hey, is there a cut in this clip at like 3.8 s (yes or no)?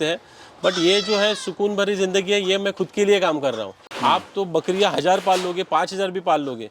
yes